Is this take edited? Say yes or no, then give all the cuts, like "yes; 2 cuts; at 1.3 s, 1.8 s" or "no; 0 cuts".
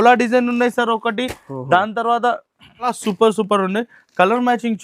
yes; 1 cut; at 3.0 s